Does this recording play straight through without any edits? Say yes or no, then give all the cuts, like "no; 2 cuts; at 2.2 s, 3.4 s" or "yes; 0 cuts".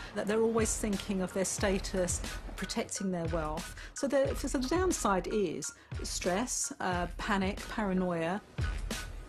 no; 1 cut; at 5.3 s